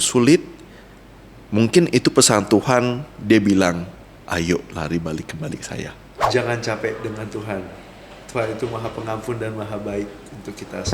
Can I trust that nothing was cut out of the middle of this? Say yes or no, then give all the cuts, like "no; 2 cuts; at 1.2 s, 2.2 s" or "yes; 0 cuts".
no; 1 cut; at 6.3 s